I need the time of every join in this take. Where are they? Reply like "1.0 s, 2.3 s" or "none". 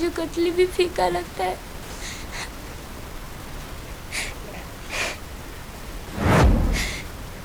none